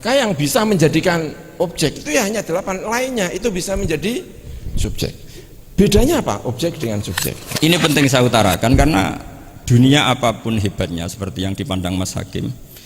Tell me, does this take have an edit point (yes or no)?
yes